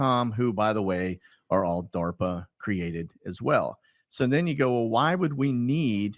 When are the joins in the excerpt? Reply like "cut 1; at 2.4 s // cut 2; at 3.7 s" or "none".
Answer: none